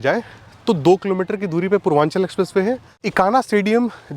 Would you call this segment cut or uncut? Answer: cut